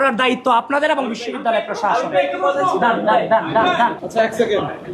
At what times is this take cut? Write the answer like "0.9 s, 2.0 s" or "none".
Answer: 4.0 s